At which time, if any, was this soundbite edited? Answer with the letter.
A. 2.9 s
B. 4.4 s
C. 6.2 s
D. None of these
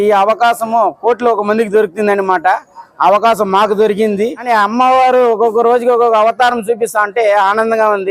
B